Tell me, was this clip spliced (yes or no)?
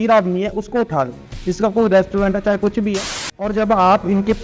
yes